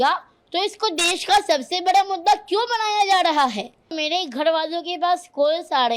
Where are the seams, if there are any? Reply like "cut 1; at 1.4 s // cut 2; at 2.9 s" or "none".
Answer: cut 1; at 4.0 s